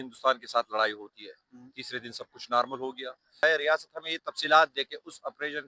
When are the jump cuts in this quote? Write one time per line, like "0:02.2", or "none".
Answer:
0:03.4